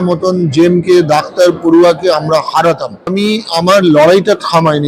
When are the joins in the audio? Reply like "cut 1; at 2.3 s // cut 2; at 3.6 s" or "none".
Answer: cut 1; at 3.1 s